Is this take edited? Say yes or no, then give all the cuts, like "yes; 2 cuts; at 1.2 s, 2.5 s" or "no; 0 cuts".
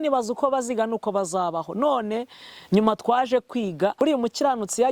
yes; 1 cut; at 3.9 s